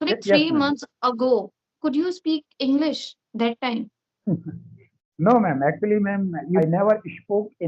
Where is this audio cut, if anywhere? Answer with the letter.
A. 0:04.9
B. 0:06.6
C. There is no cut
B